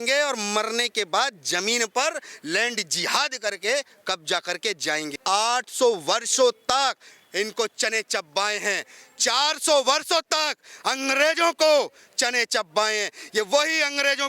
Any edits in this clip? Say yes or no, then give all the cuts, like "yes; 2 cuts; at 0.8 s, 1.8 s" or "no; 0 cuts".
yes; 1 cut; at 5.1 s